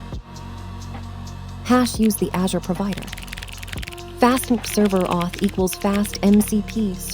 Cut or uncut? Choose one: cut